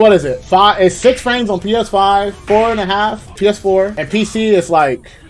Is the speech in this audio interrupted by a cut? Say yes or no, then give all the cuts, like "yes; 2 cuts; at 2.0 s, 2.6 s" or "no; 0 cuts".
no; 0 cuts